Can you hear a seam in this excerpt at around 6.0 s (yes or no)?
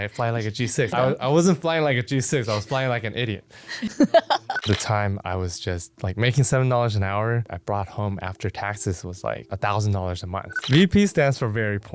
no